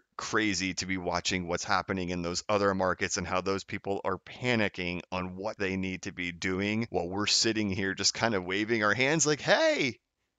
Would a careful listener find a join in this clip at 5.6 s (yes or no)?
yes